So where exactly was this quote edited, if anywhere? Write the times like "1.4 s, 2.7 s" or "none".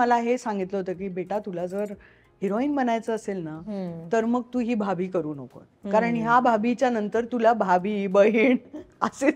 none